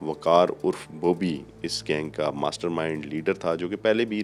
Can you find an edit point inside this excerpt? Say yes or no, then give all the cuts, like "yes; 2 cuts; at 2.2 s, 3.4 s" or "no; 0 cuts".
no; 0 cuts